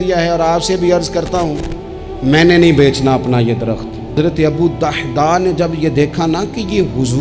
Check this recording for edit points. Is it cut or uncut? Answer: cut